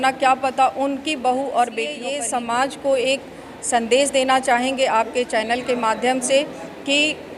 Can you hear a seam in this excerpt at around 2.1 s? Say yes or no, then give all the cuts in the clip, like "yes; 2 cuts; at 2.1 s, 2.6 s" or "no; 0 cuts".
yes; 1 cut; at 2.1 s